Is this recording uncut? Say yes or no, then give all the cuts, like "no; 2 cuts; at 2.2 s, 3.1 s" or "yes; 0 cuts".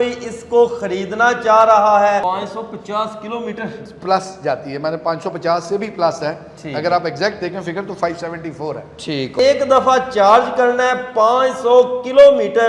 no; 2 cuts; at 2.2 s, 9.4 s